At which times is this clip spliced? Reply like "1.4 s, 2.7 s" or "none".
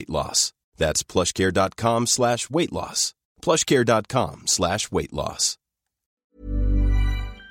6.3 s